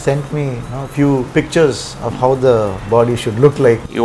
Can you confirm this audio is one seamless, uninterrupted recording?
no; 1 cut; at 1.3 s

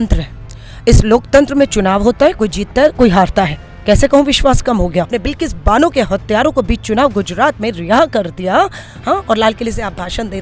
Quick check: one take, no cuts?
no; 1 cut; at 5.1 s

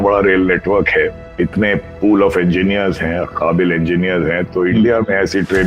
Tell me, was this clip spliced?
yes; 1 cut; at 1.2 s

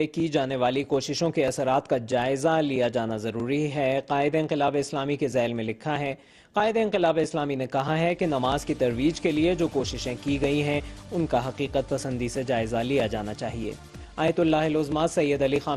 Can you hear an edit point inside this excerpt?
no; 0 cuts

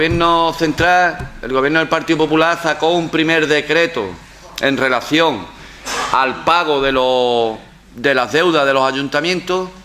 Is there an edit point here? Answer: no; 0 cuts

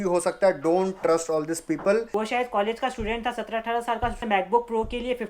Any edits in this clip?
yes; 2 cuts; at 2.1 s, 4.2 s

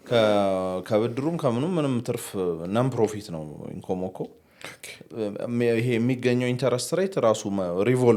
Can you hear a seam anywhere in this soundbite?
no; 0 cuts

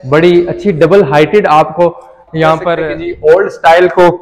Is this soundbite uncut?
no; 1 cut; at 2.7 s

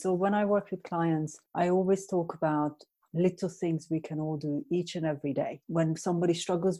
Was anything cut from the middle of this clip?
yes; 2 cuts; at 1.4 s, 5.6 s

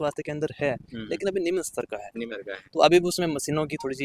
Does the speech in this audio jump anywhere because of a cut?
no; 0 cuts

